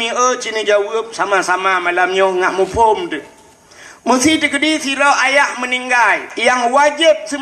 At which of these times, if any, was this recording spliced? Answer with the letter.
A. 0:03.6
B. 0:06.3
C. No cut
B